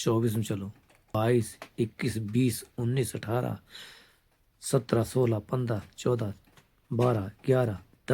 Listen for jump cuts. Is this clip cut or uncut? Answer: cut